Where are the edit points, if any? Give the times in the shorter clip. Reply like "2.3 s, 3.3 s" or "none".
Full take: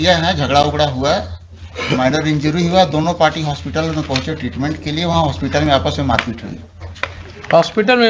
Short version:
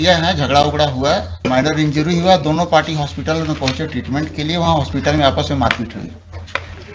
1.3 s